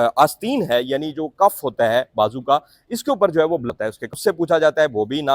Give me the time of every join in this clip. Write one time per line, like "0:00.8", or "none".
0:04.1